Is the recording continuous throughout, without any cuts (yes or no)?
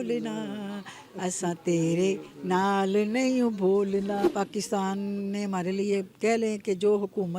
no